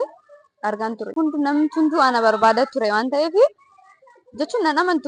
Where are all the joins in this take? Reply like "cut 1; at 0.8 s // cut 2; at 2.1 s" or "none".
cut 1; at 1.1 s